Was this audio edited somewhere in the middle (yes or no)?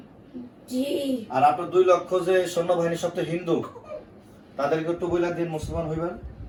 no